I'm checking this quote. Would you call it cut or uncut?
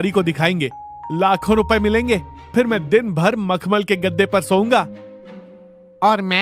cut